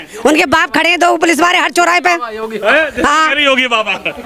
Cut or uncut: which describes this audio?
uncut